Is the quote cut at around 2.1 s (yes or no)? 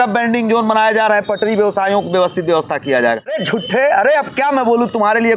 no